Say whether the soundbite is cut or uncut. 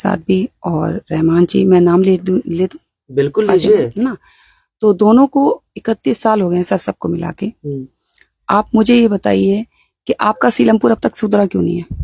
uncut